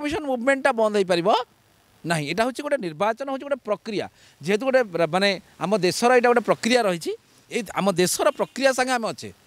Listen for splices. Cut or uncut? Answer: uncut